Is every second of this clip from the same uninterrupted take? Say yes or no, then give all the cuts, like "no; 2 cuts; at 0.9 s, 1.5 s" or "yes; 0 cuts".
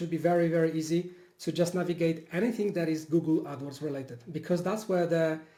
yes; 0 cuts